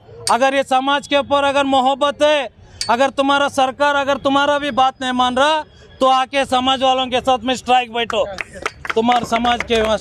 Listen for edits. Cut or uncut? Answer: uncut